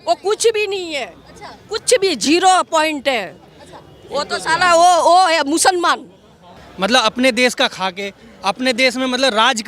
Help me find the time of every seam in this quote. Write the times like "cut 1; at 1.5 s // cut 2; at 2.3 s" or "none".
cut 1; at 6.6 s

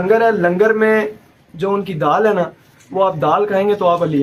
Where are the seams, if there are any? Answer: none

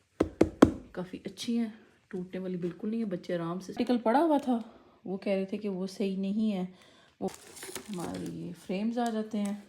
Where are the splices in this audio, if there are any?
cut 1; at 3.8 s // cut 2; at 7.3 s

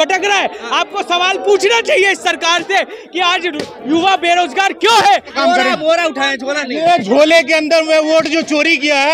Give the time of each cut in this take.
cut 1; at 5.3 s

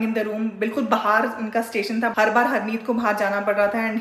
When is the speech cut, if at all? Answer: cut 1; at 2.1 s

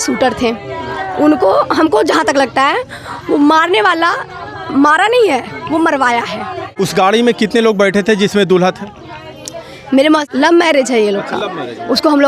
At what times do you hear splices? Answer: cut 1; at 6.7 s // cut 2; at 10.2 s

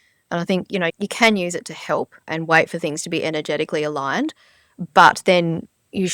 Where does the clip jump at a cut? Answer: cut 1; at 0.9 s // cut 2; at 2.3 s

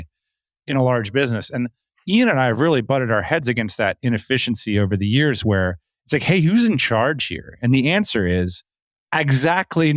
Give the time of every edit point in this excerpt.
none

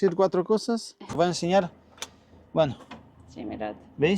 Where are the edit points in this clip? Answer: cut 1; at 1.2 s

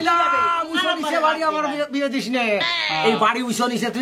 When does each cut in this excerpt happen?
none

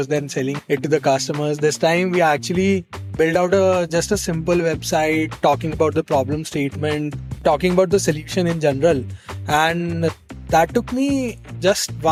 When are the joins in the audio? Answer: none

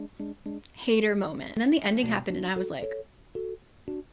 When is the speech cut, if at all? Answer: cut 1; at 1.5 s

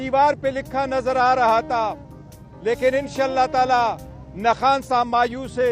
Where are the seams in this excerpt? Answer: none

